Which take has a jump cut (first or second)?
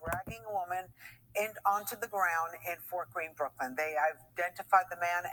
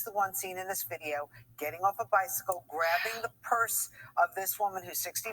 second